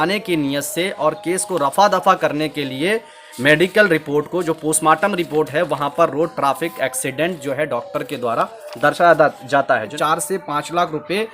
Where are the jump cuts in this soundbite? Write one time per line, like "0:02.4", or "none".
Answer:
0:09.9